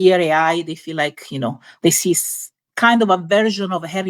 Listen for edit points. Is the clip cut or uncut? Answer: uncut